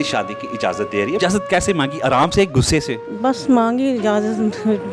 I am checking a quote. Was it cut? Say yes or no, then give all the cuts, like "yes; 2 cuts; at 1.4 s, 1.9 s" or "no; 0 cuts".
yes; 2 cuts; at 1.2 s, 3.1 s